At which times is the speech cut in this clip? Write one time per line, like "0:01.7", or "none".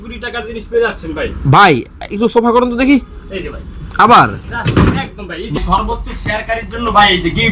0:05.6